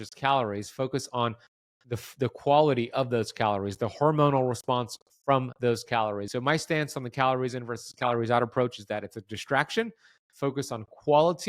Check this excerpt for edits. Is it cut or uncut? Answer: cut